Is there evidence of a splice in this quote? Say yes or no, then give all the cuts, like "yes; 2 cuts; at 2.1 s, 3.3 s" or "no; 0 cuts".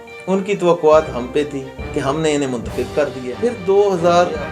yes; 1 cut; at 3.3 s